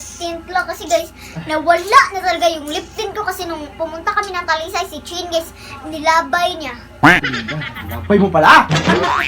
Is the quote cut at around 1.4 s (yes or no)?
no